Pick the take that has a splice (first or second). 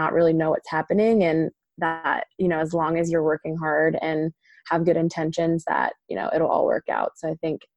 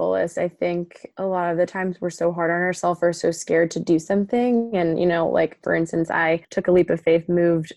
second